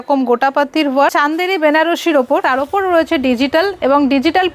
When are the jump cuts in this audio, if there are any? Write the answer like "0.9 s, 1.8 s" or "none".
1.1 s, 2.4 s